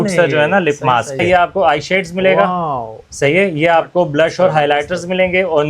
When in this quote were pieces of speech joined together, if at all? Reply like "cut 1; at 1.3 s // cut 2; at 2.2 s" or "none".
cut 1; at 1.2 s